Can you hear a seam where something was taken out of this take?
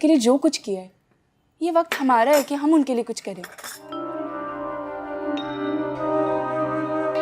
yes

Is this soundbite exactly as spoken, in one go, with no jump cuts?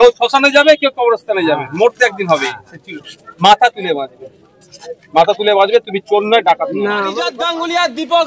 no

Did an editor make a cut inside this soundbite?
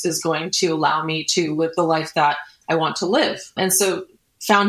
no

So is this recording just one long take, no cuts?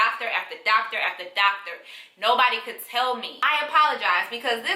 no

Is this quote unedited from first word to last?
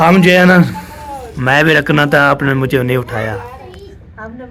yes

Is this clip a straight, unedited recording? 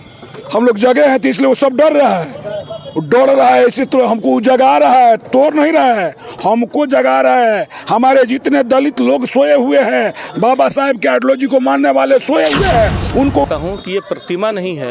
no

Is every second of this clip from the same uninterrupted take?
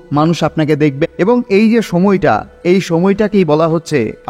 no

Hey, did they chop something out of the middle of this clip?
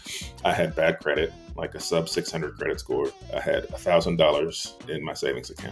yes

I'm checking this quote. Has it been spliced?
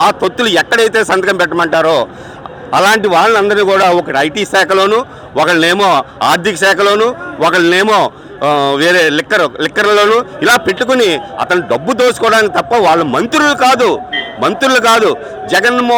no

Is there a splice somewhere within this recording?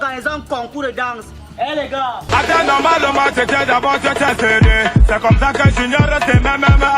yes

